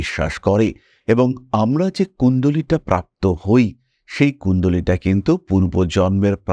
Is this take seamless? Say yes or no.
yes